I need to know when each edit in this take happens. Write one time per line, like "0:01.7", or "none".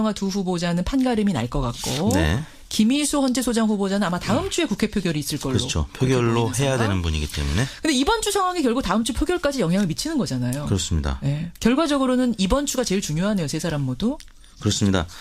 0:06.5